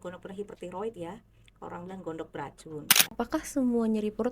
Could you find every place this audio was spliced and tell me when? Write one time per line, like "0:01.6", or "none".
0:03.2